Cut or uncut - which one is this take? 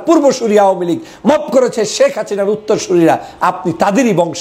uncut